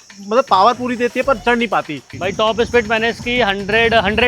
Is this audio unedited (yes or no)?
no